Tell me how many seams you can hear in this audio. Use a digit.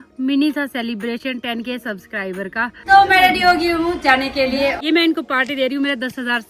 2